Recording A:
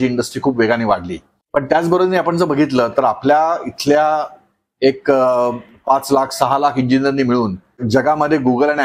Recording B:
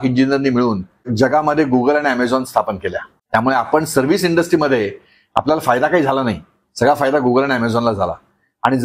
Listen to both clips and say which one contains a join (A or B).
B